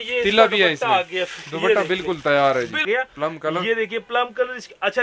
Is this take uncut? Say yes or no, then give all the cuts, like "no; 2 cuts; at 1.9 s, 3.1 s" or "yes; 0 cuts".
no; 1 cut; at 2.8 s